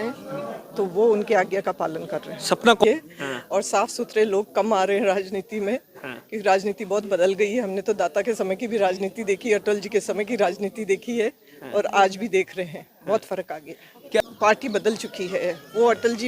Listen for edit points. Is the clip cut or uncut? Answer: cut